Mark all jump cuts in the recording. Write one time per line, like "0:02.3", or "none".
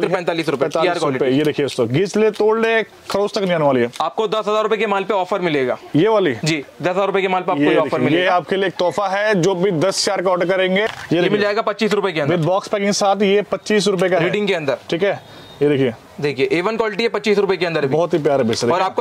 0:04.0
0:10.9